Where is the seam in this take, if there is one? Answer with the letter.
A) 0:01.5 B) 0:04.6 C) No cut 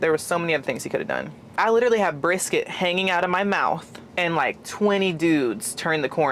A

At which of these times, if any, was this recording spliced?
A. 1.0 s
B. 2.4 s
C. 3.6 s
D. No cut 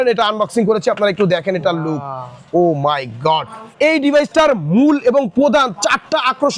C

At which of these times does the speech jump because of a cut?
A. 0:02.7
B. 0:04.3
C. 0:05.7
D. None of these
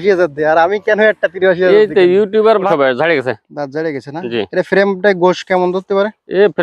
A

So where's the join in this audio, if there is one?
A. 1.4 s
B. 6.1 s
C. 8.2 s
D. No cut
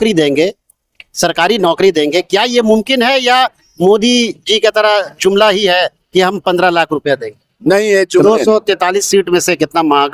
C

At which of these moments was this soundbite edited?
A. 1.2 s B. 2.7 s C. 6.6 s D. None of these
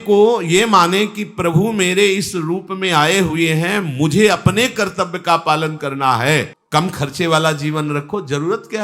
C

